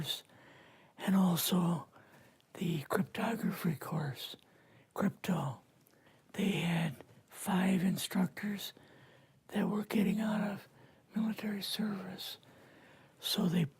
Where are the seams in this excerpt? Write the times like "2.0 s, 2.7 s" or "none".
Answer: 7.1 s